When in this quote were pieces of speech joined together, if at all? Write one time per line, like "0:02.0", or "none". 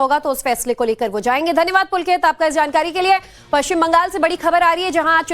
0:03.3

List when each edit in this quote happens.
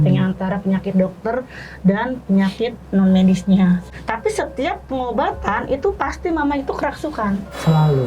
0:03.9

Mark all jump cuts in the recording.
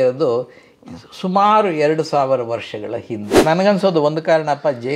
0:03.4

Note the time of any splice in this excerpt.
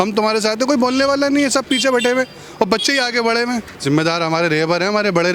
0:03.7

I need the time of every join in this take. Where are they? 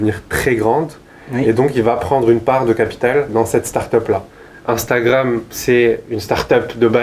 0:03.3
0:04.5

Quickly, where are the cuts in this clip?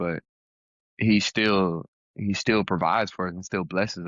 none

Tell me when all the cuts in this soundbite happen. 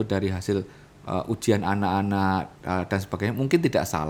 none

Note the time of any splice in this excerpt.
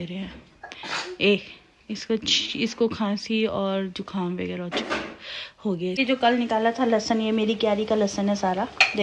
0:06.0

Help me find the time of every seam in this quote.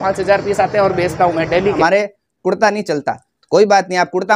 0:01.8

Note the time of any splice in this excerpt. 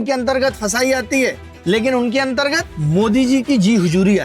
0:01.5
0:02.7

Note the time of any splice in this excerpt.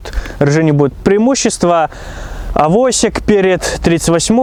none

